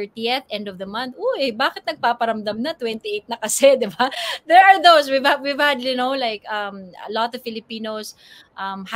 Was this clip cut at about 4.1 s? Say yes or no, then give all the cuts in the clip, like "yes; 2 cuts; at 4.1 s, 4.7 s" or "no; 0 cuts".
no; 0 cuts